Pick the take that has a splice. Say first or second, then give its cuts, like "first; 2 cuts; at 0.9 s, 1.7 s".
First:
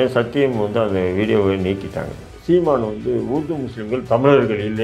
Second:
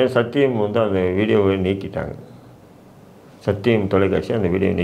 first; 1 cut; at 2.3 s